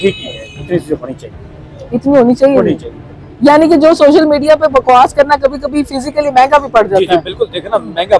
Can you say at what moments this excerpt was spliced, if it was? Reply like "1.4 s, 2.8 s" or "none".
none